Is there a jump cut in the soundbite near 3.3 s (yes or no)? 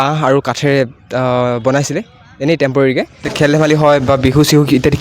yes